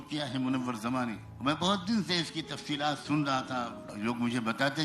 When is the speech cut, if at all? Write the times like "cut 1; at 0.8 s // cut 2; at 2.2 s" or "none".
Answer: cut 1; at 1.3 s // cut 2; at 3.8 s